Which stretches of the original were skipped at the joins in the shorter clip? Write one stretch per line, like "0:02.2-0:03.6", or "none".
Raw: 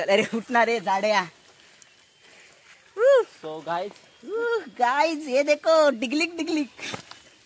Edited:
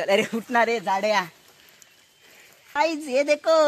0:02.8-0:05.0